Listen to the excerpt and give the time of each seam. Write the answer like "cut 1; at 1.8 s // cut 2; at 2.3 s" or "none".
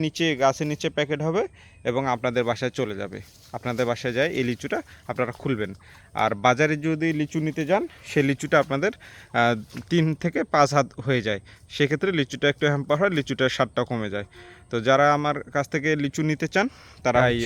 none